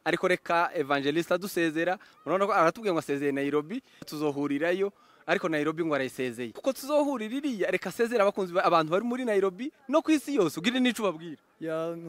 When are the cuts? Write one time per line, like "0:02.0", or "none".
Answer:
none